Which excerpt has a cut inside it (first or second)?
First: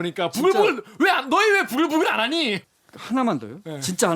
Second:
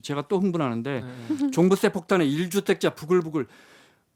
first